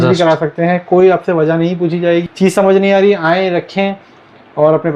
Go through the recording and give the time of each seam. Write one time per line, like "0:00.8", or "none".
0:02.3